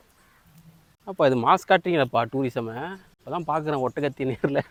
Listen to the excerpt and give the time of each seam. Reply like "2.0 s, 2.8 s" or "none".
none

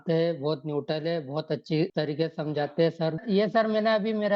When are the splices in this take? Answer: 1.9 s, 3.2 s

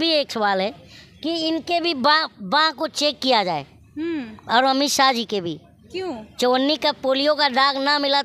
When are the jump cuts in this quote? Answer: none

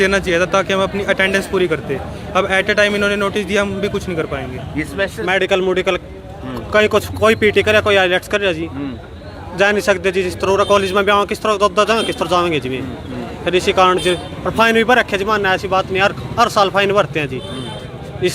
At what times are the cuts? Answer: 5.0 s

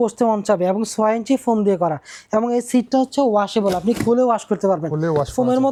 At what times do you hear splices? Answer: none

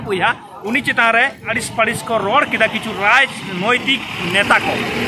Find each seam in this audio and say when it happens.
1.5 s

